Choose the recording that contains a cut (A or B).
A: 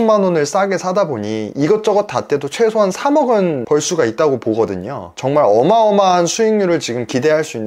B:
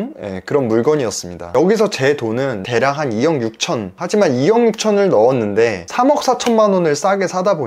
B